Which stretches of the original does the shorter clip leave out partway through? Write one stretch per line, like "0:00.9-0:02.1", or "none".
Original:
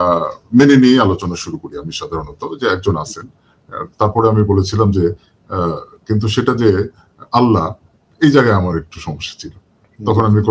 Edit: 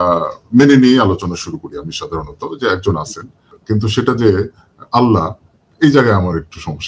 0:03.5-0:05.9